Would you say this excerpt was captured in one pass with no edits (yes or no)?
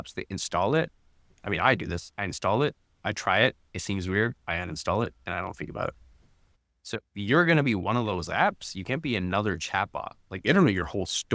yes